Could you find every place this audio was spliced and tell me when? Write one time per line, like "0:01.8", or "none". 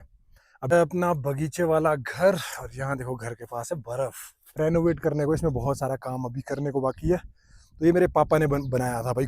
0:00.7
0:04.5